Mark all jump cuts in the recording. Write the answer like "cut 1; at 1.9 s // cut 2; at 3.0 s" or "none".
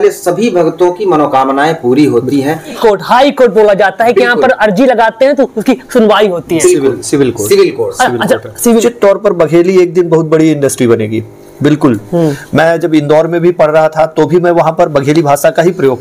cut 1; at 2.7 s // cut 2; at 8.8 s // cut 3; at 12.0 s